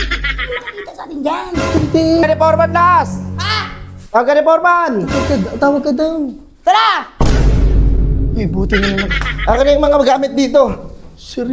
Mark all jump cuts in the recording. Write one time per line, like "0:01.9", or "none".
0:02.2